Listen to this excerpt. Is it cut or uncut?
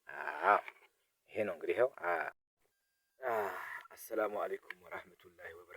cut